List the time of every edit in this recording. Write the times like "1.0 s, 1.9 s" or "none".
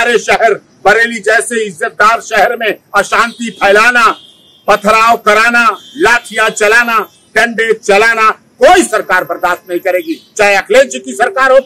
none